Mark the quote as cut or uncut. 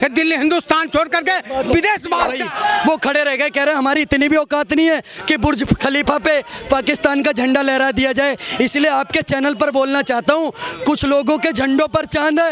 cut